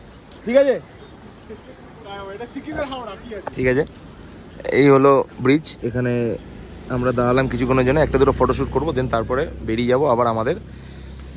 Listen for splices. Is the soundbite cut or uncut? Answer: uncut